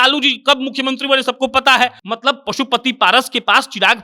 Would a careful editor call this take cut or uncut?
cut